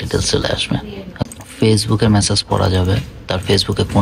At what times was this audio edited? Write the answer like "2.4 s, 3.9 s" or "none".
1.2 s